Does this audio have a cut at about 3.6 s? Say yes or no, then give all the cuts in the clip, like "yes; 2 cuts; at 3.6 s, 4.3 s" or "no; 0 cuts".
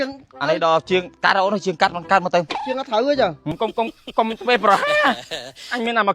yes; 1 cut; at 3.6 s